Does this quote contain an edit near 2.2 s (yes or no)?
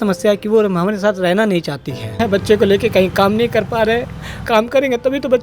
yes